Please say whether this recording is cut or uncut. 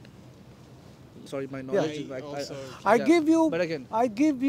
cut